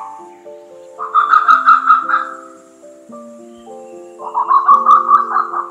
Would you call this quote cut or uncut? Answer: uncut